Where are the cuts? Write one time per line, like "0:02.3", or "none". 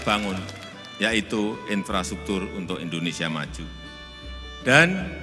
none